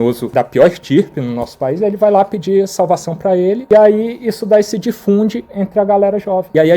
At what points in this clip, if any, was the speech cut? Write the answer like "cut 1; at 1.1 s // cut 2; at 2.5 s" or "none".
cut 1; at 3.6 s